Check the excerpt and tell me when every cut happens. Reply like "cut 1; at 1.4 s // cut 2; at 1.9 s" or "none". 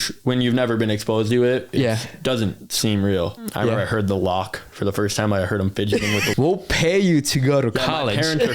cut 1; at 3.4 s // cut 2; at 6.3 s